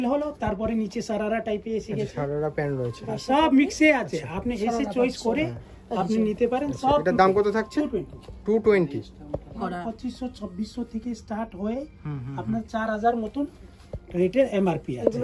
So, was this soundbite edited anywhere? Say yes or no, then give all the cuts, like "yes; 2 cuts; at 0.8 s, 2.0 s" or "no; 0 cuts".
yes; 1 cut; at 9.6 s